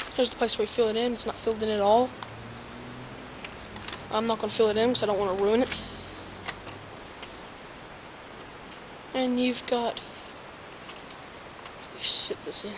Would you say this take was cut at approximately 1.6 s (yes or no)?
yes